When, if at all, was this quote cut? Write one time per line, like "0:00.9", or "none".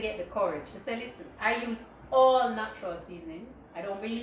0:01.2